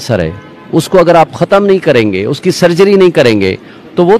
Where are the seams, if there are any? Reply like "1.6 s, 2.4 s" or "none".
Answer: none

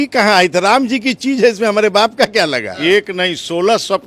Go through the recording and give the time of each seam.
2.7 s

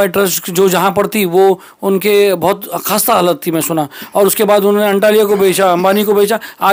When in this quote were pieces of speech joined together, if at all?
none

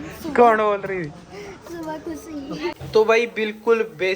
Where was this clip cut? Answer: 2.8 s

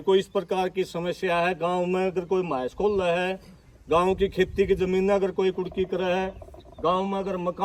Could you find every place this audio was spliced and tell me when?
none

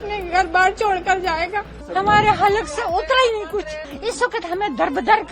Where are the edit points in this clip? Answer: 1.8 s, 3.8 s

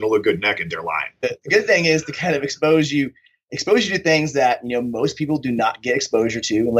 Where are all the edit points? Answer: 1.2 s

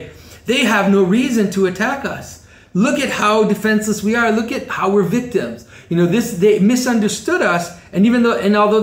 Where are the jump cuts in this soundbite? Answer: none

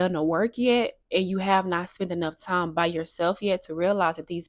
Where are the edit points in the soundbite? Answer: none

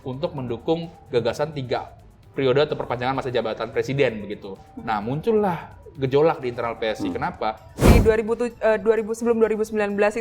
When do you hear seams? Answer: 7.7 s

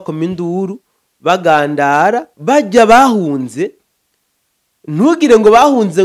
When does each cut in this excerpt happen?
2.3 s

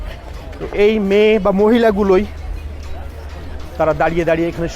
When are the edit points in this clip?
none

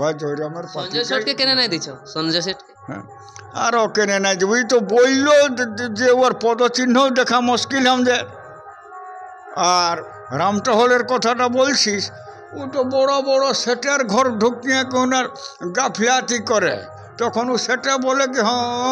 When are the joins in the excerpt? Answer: none

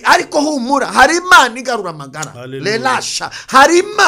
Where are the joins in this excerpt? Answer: none

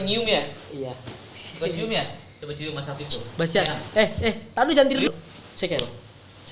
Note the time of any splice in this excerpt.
5.1 s

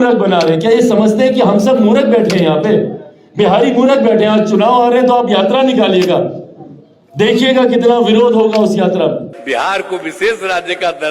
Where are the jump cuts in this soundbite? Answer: 9.3 s

